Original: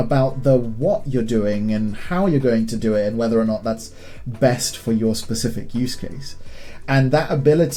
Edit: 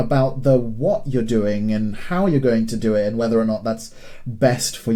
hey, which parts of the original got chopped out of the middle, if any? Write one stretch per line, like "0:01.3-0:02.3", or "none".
none